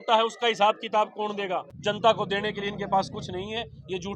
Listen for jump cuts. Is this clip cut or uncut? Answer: cut